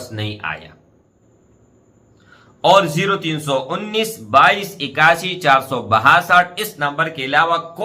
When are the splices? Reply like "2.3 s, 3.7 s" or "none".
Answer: 1.1 s